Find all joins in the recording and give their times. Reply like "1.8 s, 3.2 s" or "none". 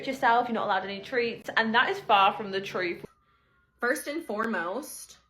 3.0 s